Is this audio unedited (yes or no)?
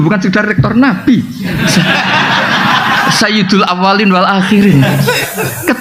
yes